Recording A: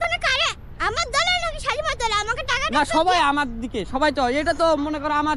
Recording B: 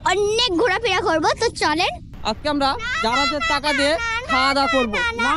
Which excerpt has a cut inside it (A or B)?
B